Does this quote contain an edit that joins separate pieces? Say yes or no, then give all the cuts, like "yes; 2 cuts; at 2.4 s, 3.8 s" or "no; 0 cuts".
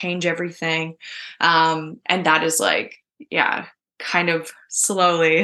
no; 0 cuts